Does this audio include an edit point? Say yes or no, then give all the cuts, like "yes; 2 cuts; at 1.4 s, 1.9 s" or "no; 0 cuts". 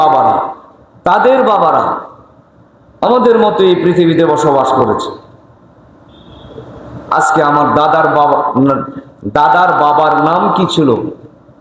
no; 0 cuts